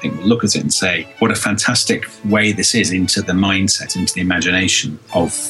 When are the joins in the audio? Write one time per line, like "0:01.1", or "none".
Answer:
0:01.0